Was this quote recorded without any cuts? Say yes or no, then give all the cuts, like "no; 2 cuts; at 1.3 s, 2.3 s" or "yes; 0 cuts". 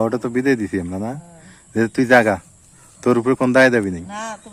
yes; 0 cuts